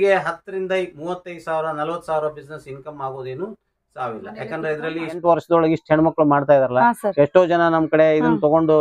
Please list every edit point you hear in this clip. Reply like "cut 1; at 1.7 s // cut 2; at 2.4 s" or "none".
cut 1; at 5.2 s